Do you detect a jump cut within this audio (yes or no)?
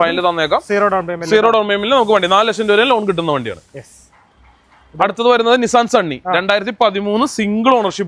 no